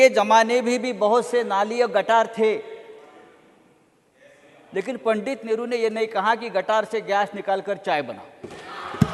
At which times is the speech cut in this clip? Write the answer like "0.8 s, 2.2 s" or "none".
none